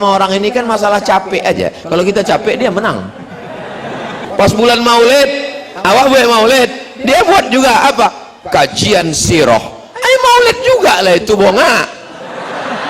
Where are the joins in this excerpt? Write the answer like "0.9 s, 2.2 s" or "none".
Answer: 4.3 s